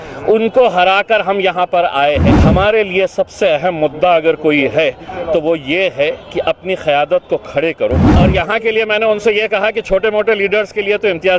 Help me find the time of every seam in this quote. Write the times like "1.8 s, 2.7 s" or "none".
2.3 s, 8.1 s